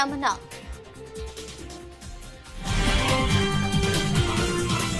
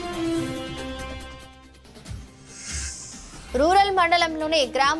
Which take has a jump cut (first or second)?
second